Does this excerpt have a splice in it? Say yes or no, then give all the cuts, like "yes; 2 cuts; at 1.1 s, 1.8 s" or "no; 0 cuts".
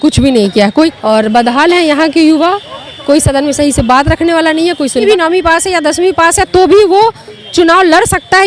yes; 2 cuts; at 0.9 s, 5.0 s